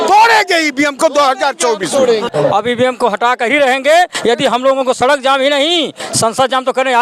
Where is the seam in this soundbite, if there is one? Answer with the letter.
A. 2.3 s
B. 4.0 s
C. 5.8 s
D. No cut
A